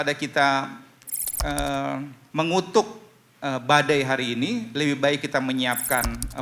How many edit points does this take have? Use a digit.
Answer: 1